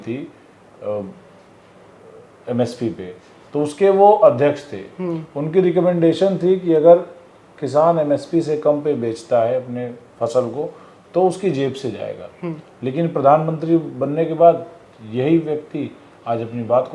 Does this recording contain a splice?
no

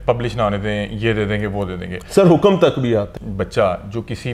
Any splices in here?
yes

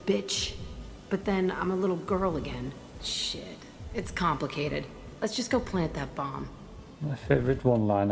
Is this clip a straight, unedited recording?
yes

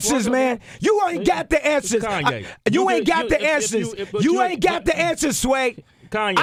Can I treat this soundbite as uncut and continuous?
yes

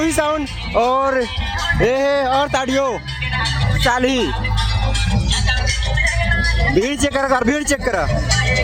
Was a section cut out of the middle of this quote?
no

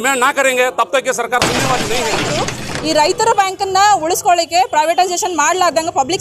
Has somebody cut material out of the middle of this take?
yes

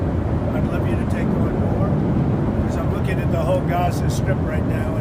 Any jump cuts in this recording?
no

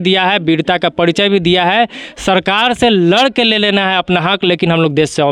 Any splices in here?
no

